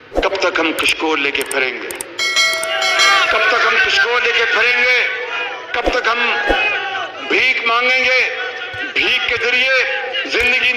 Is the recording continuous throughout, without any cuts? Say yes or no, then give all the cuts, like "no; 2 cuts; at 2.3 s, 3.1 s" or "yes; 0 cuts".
yes; 0 cuts